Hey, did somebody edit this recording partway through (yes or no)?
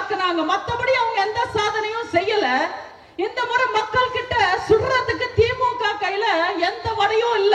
no